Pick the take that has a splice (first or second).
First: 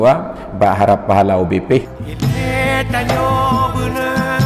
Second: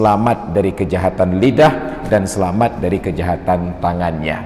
first